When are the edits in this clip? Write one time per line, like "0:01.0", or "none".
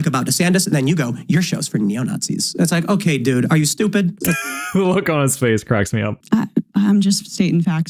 none